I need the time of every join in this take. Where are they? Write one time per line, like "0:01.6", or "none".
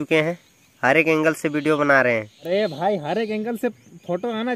0:02.4